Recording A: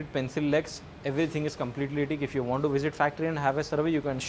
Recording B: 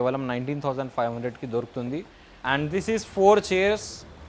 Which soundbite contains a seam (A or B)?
B